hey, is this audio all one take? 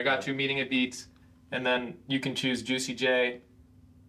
yes; 0 cuts

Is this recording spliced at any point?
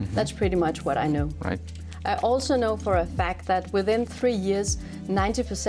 no; 0 cuts

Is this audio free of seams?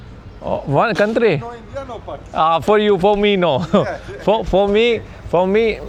yes; 0 cuts

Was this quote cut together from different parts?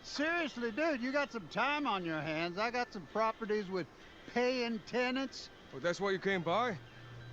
yes; 2 cuts; at 3.4 s, 6.4 s

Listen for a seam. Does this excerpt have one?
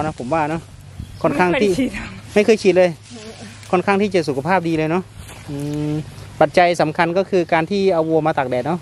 no; 0 cuts

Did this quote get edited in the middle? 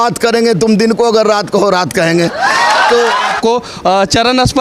yes; 1 cut; at 3.3 s

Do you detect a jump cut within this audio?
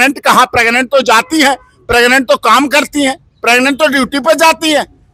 no; 0 cuts

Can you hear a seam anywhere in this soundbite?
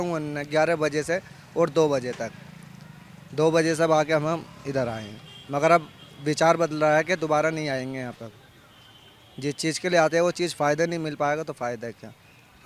no; 0 cuts

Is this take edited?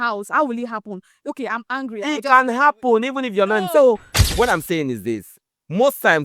yes; 1 cut; at 4.1 s

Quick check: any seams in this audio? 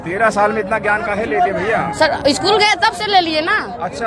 no; 0 cuts

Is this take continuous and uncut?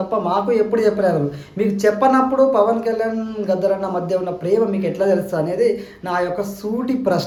yes; 0 cuts

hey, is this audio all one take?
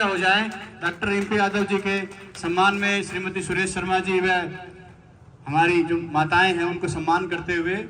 yes; 0 cuts

